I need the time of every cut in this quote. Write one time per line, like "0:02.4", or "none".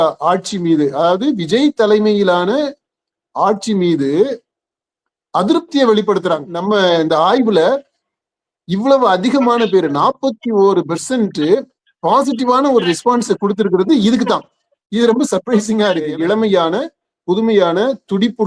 0:06.5
0:16.1